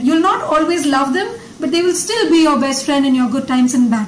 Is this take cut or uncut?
uncut